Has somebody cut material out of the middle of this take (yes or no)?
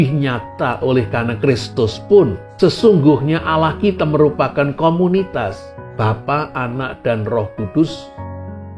yes